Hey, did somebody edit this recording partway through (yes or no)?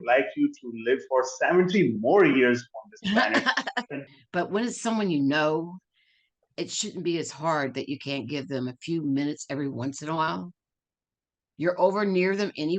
yes